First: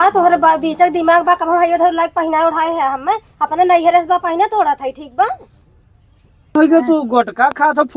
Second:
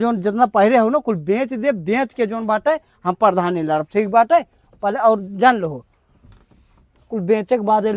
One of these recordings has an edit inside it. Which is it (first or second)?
first